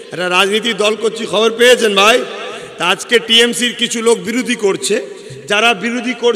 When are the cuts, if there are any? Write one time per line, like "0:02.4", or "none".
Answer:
none